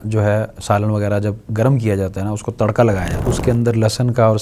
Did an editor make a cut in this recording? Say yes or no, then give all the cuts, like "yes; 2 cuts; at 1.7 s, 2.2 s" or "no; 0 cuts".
yes; 1 cut; at 3.1 s